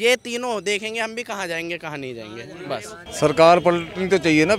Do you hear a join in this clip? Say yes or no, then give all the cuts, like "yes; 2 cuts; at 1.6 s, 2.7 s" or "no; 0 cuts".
yes; 1 cut; at 3.0 s